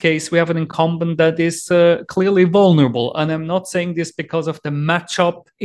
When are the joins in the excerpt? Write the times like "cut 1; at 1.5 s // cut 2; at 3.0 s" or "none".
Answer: none